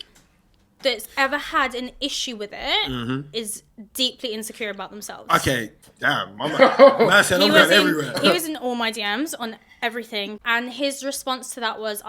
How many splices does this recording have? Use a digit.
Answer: 2